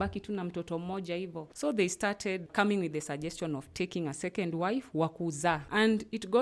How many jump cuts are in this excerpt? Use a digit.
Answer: 3